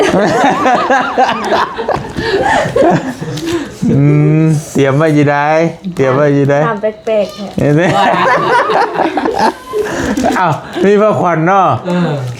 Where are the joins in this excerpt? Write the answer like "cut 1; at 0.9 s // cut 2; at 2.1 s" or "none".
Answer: none